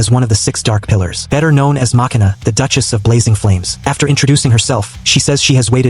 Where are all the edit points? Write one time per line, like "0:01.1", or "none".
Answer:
0:01.2
0:02.3
0:03.7
0:05.0